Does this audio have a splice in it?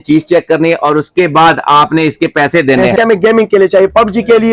yes; 1 cut; at 2.9 s

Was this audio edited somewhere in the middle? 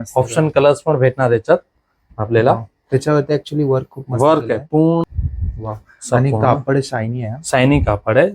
yes; 1 cut; at 5.0 s

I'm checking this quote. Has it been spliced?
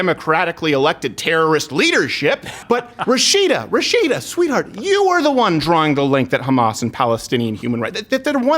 yes; 1 cut; at 2.5 s

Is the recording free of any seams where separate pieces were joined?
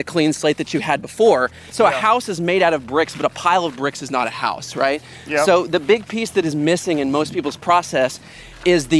no; 1 cut; at 1.6 s

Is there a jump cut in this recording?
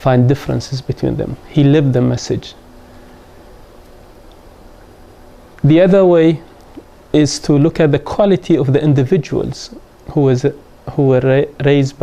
yes; 1 cut; at 6.0 s

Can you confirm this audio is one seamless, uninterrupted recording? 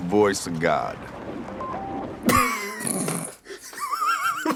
yes; 0 cuts

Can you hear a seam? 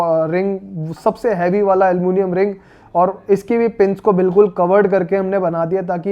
no; 0 cuts

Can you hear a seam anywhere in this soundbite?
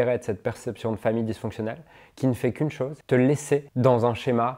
yes; 2 cuts; at 3.0 s, 3.7 s

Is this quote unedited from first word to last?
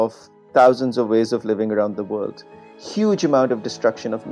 yes; 0 cuts

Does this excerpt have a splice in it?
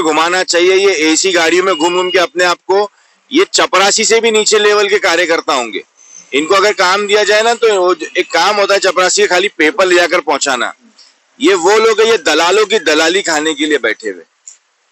no; 0 cuts

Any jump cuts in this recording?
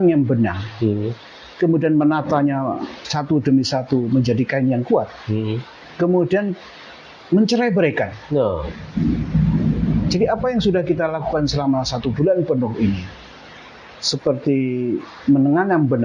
no; 0 cuts

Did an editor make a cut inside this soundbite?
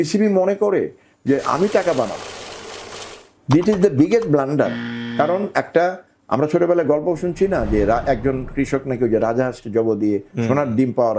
no; 0 cuts

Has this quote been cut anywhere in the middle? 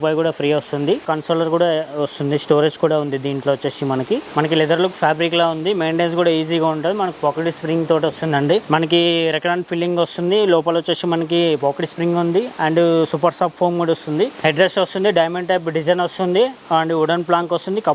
yes; 4 cuts; at 1.0 s, 4.3 s, 8.6 s, 14.3 s

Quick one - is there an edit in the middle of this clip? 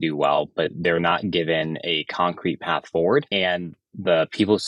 yes; 1 cut; at 3.3 s

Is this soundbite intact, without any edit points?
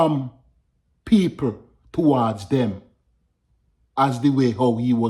yes; 0 cuts

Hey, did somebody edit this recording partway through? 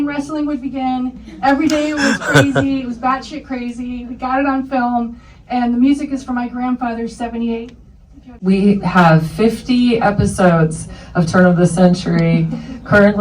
yes; 1 cut; at 8.3 s

